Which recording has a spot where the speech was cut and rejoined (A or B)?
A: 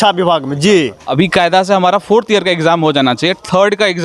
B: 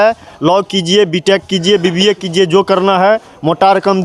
A